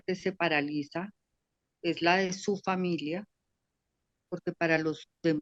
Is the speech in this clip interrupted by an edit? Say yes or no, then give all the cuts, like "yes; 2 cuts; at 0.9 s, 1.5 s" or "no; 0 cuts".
no; 0 cuts